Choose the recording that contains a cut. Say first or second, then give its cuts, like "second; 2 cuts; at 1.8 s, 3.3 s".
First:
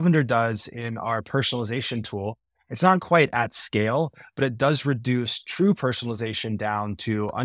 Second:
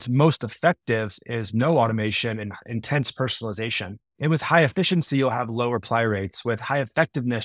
second; 1 cut; at 4.0 s